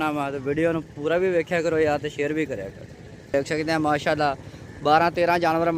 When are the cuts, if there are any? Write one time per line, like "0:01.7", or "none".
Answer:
0:03.3